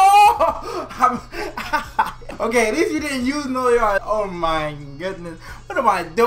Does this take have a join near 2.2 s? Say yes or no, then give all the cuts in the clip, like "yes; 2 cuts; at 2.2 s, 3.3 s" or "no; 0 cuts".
yes; 2 cuts; at 2.2 s, 4.0 s